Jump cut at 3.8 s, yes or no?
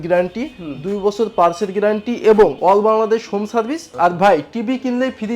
yes